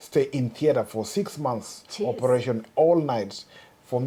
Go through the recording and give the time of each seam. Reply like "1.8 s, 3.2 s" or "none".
none